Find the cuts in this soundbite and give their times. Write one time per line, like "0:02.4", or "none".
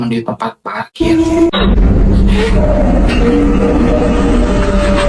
0:01.0